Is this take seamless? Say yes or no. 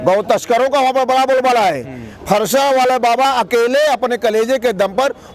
yes